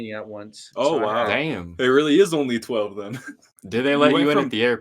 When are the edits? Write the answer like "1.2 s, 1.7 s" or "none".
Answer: 3.5 s